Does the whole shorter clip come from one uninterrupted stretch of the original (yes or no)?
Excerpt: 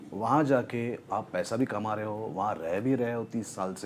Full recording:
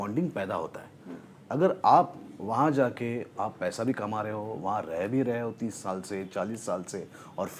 yes